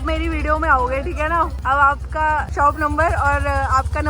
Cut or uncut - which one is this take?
cut